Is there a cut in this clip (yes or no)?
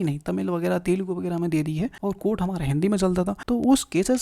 yes